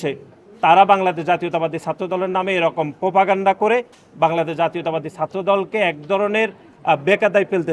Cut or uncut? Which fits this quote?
uncut